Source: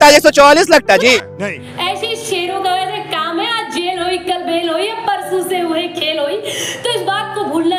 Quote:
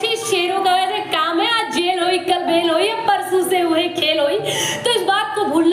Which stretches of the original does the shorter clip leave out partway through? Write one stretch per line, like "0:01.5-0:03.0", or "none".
none